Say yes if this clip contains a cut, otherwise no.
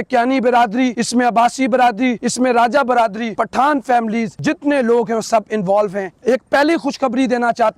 yes